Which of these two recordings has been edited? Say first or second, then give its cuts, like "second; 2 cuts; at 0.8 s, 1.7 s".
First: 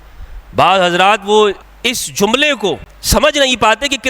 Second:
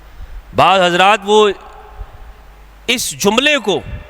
first; 2 cuts; at 1.7 s, 2.9 s